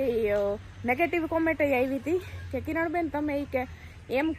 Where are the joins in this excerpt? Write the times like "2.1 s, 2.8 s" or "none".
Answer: none

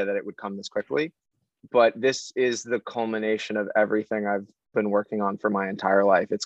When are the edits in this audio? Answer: none

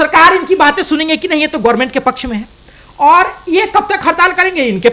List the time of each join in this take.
none

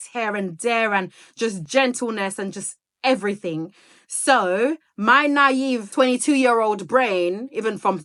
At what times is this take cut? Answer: none

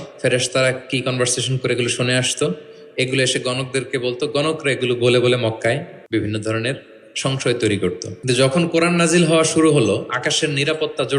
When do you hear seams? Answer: 5.9 s, 8.1 s

